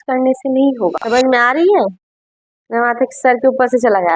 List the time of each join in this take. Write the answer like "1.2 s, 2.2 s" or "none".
1.0 s

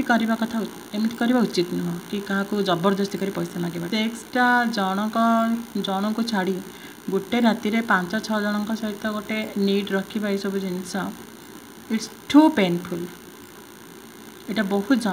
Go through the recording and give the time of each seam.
3.8 s

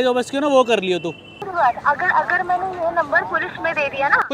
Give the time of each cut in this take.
1.4 s

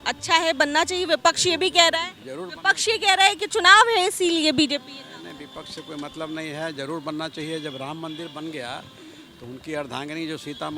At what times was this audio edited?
none

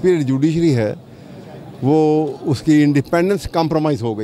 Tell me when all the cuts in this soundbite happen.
none

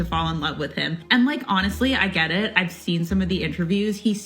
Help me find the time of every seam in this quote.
1.0 s

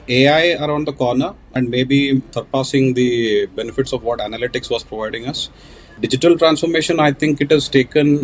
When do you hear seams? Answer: 1.4 s, 2.3 s, 5.9 s

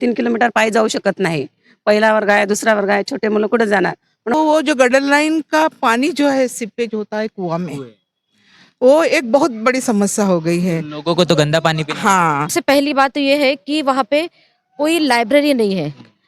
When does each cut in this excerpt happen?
4.3 s, 12.5 s

